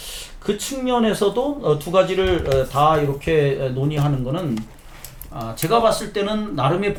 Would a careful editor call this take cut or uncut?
uncut